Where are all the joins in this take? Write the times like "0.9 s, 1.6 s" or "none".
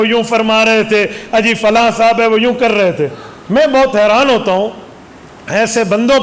none